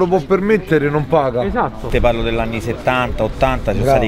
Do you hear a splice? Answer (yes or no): yes